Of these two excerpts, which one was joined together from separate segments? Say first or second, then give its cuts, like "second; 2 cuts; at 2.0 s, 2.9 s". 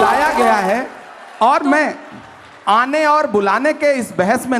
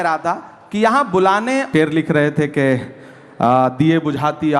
second; 1 cut; at 1.7 s